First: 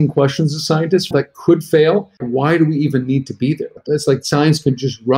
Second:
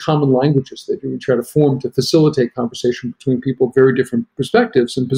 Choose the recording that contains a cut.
first; 3 cuts; at 1.1 s, 2.2 s, 3.8 s

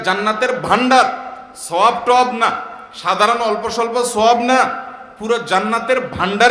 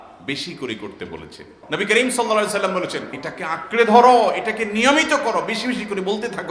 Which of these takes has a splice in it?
second; 2 cuts; at 1.5 s, 3.2 s

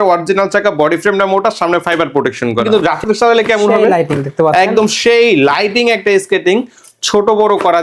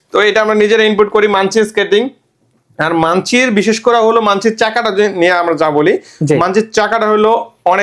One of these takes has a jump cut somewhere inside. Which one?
first; 1 cut; at 2.7 s

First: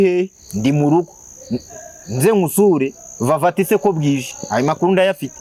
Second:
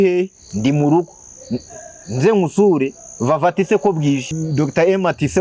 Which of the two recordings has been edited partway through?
second; 1 cut; at 4.3 s

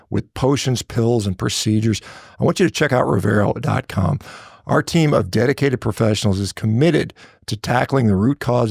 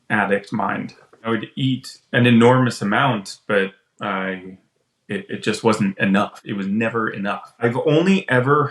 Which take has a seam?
second; 3 cuts; at 1.3 s, 6.4 s, 7.6 s

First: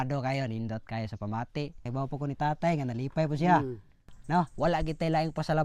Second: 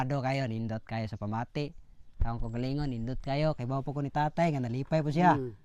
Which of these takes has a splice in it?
first; 2 cuts; at 1.9 s, 4.5 s

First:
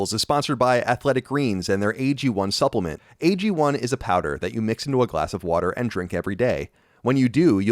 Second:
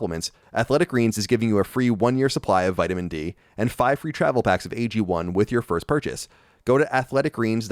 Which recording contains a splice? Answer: first; 1 cut; at 3.0 s

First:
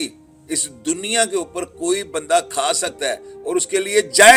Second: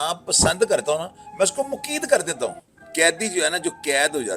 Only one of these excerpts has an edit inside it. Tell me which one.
second; 1 cut; at 2.7 s

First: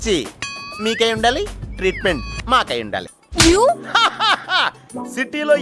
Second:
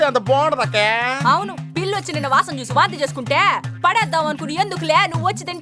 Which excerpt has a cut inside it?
first; 1 cut; at 3.2 s

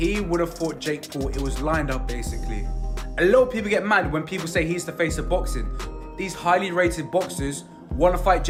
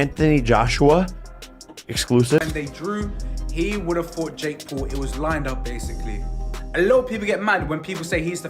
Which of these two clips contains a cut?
second; 1 cut; at 2.5 s

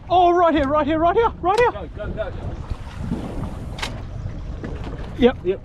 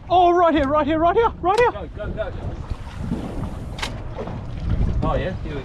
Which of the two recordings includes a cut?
first; 1 cut; at 4.1 s

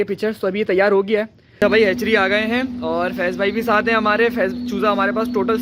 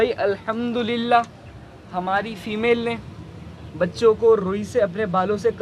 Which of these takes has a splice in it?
first; 1 cut; at 1.4 s

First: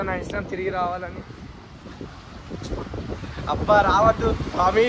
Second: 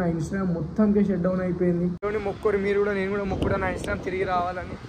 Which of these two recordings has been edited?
second; 1 cut; at 2.0 s

